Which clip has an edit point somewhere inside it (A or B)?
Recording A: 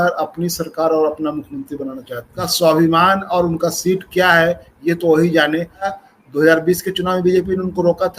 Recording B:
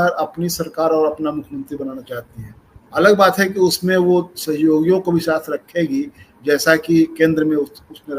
A